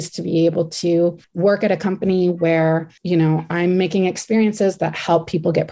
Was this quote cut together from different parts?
yes; 2 cuts; at 1.2 s, 2.9 s

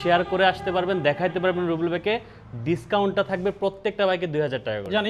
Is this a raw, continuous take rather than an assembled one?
yes; 0 cuts

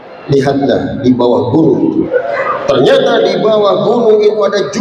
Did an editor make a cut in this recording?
yes; 1 cut; at 2.1 s

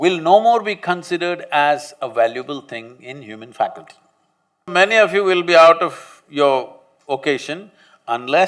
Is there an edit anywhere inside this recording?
yes; 1 cut; at 4.7 s

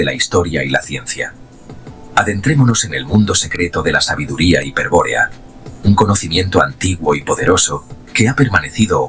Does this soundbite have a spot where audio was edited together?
no; 0 cuts

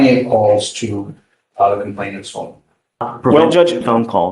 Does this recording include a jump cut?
yes; 1 cut; at 3.1 s

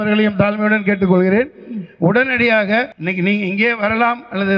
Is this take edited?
yes; 1 cut; at 3.0 s

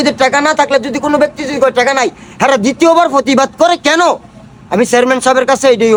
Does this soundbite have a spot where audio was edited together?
no; 0 cuts

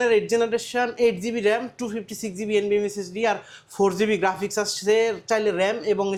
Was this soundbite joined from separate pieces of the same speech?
no; 0 cuts

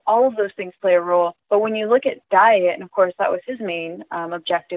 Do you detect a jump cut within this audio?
yes; 1 cut; at 1.4 s

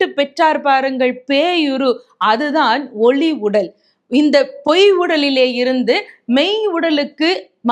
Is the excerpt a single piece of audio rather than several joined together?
yes; 0 cuts

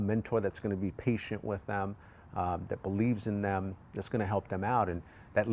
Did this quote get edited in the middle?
no; 0 cuts

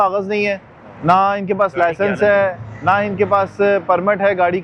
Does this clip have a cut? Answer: no; 0 cuts

